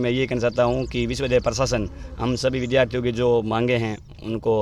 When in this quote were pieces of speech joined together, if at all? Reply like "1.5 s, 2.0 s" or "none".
none